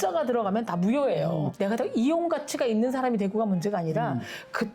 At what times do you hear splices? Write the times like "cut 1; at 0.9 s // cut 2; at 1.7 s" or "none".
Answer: cut 1; at 1.5 s